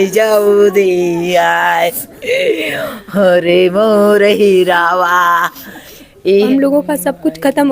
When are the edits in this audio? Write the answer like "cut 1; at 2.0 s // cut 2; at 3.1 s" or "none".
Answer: cut 1; at 6.5 s